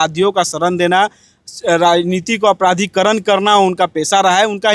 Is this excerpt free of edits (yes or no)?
yes